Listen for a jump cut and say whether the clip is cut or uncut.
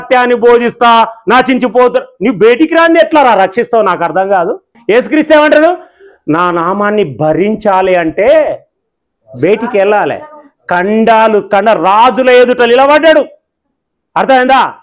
uncut